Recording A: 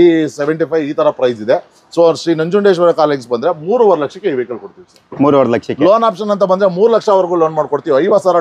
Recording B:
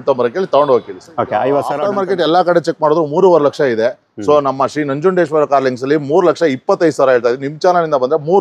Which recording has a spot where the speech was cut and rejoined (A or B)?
B